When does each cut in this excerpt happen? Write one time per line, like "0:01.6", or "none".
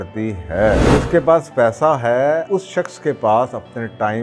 0:00.8
0:02.4